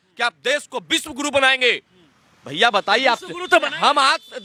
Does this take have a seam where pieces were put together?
no; 0 cuts

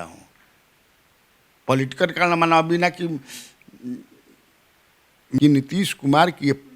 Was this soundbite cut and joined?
yes; 1 cut; at 5.2 s

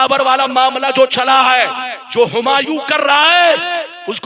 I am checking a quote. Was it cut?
no; 0 cuts

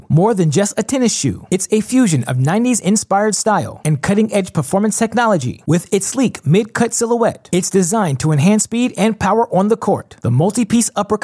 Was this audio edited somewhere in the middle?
no; 0 cuts

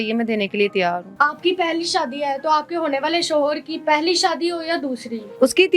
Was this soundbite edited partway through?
no; 0 cuts

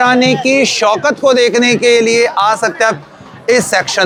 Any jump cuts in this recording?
no; 0 cuts

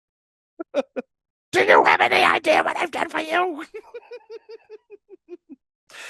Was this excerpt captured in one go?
yes; 0 cuts

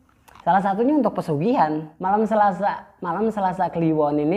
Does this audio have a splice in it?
yes; 1 cut; at 1.9 s

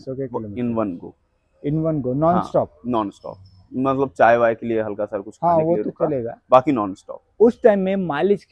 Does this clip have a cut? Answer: no; 0 cuts

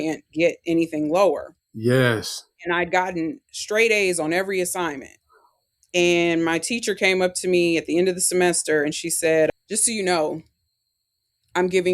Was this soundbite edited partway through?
yes; 1 cut; at 9.7 s

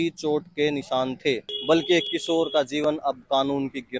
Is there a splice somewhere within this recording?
yes; 1 cut; at 1.5 s

